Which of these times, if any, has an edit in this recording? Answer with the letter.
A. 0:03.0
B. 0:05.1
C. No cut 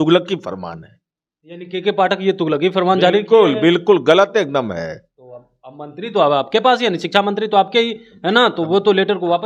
C